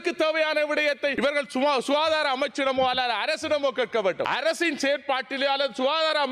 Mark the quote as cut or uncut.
cut